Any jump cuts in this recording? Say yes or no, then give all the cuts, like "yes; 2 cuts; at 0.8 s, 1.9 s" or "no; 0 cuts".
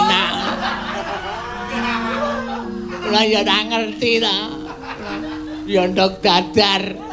no; 0 cuts